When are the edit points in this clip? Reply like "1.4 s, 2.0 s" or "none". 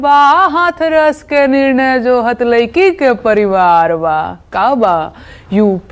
none